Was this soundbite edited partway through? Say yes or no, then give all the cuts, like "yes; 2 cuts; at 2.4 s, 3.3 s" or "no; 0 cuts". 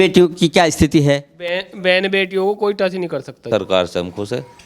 yes; 1 cut; at 3.5 s